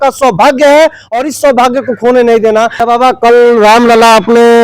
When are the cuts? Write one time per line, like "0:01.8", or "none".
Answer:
0:02.7